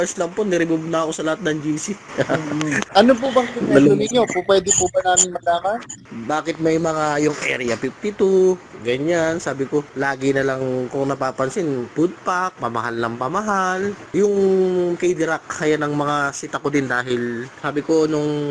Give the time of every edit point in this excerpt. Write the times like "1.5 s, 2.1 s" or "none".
2.8 s, 6.0 s, 9.9 s, 11.9 s, 14.0 s, 17.5 s